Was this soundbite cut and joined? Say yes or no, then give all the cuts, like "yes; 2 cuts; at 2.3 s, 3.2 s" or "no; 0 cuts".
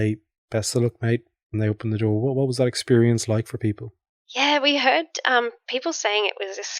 no; 0 cuts